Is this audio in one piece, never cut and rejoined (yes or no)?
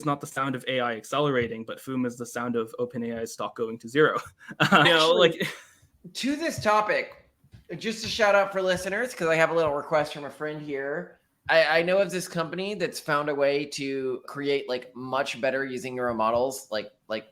yes